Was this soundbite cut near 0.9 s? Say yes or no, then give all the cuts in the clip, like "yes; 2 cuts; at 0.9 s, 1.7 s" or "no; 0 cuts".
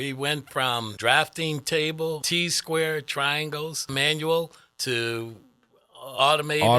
yes; 3 cuts; at 0.9 s, 2.2 s, 3.9 s